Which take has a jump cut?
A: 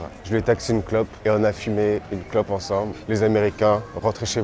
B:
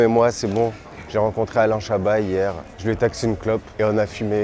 A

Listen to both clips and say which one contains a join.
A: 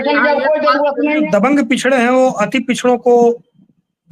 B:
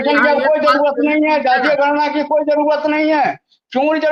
A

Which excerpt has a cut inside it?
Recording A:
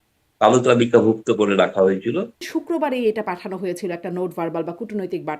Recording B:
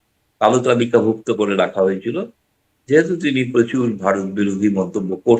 A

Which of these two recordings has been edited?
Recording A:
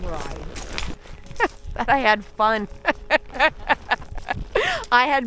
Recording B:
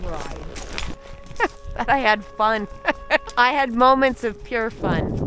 B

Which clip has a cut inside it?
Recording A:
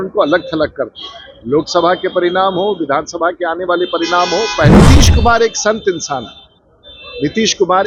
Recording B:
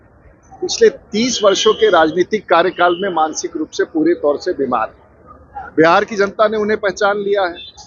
A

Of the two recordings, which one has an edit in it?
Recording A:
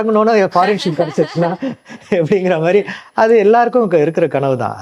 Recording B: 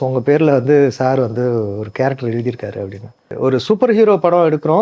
B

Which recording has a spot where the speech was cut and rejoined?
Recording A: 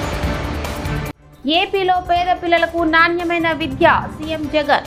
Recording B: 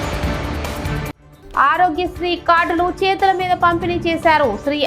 B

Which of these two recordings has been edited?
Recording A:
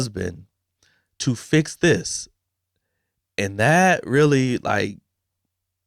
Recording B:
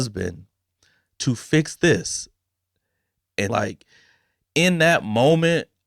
B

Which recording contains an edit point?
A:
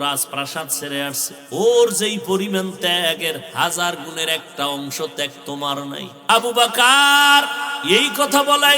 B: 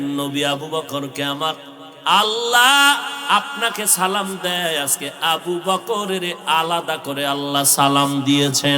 A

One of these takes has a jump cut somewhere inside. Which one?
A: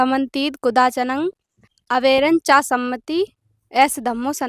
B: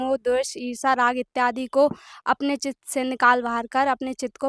A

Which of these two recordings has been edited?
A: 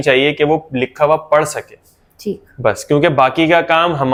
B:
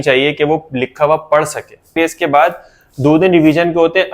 B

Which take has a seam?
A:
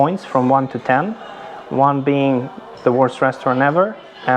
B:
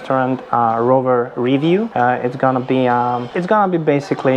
B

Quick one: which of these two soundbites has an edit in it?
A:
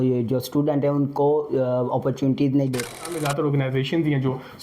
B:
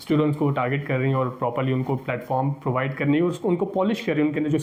A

